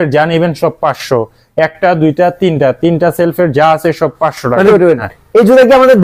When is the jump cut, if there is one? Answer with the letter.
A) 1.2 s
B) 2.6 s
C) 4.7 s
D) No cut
C